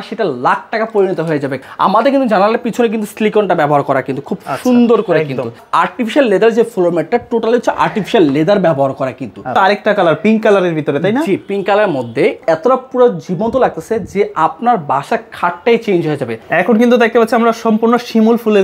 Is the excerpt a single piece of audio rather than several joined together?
no; 5 cuts; at 1.6 s, 5.6 s, 9.3 s, 12.4 s, 16.3 s

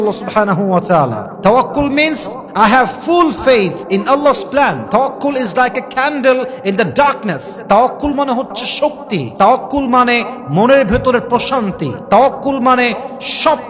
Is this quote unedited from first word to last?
no; 1 cut; at 4.8 s

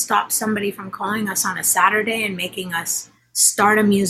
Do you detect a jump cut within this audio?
no; 0 cuts

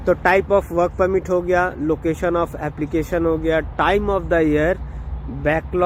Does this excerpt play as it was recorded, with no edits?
yes; 0 cuts

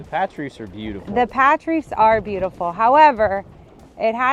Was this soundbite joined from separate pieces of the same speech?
no; 0 cuts

